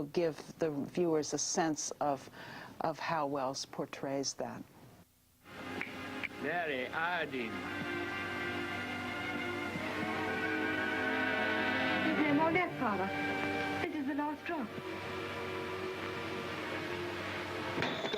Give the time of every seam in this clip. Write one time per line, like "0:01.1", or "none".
0:03.5